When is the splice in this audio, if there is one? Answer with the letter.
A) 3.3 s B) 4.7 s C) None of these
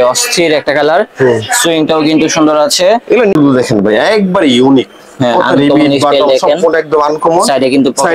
A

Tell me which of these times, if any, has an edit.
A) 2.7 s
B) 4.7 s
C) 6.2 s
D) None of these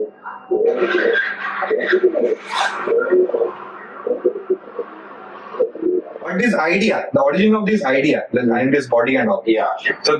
C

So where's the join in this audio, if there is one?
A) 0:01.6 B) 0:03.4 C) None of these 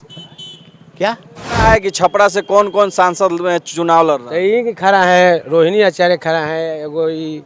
A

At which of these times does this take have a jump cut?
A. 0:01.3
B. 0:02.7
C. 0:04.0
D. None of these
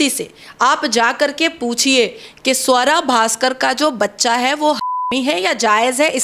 D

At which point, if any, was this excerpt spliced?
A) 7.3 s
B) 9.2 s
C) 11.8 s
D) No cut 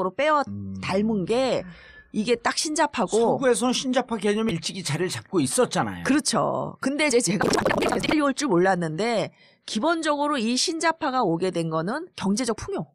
A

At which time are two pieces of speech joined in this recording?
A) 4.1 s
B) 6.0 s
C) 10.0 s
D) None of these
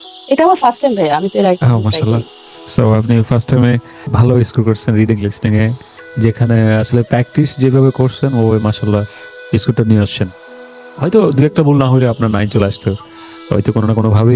A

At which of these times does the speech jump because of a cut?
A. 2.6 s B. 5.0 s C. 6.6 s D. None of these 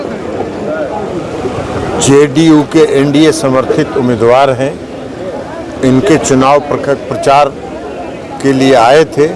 D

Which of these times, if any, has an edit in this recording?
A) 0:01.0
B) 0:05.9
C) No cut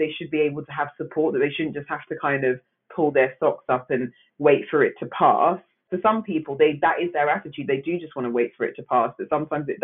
B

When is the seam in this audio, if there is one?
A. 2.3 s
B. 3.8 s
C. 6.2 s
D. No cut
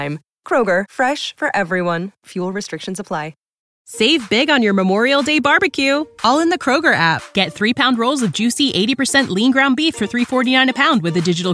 B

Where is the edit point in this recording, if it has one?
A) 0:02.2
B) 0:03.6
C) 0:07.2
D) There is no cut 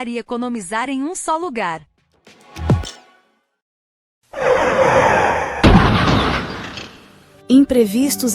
B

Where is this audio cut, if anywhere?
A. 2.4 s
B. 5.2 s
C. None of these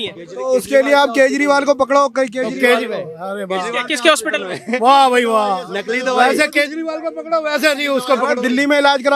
C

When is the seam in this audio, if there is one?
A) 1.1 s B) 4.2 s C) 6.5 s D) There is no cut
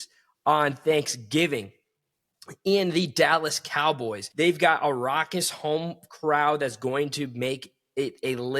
B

